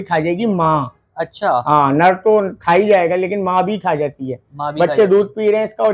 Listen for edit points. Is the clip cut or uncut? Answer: uncut